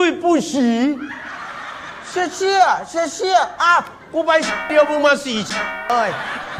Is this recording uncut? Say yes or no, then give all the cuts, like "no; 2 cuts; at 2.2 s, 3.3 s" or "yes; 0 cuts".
yes; 0 cuts